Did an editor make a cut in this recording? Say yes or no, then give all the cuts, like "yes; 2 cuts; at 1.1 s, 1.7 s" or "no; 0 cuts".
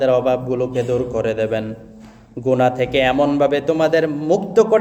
no; 0 cuts